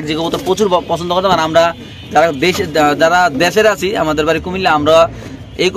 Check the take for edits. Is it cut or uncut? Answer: uncut